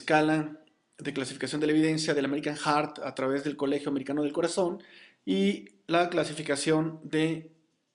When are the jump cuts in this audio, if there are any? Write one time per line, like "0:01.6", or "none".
0:04.9